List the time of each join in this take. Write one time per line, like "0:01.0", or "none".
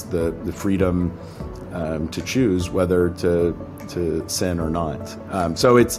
none